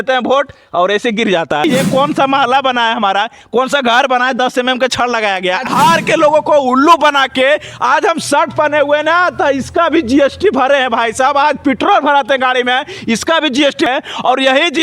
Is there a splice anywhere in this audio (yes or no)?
yes